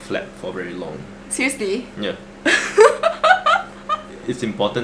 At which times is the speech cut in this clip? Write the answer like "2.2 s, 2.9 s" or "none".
none